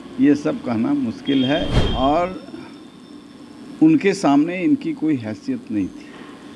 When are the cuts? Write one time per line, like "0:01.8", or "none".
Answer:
0:01.8